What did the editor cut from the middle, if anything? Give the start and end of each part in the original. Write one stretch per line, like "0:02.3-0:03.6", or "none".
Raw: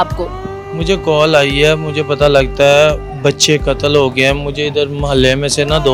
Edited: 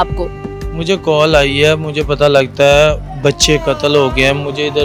none